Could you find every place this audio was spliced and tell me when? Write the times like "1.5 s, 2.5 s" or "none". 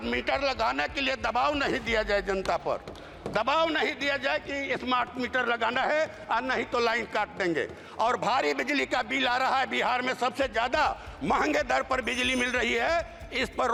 none